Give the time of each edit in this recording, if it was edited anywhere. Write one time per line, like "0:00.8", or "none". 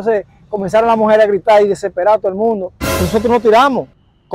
0:03.1